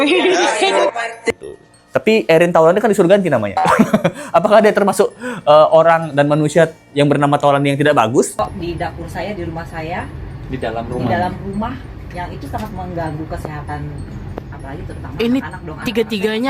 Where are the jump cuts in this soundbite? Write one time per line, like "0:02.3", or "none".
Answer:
0:08.3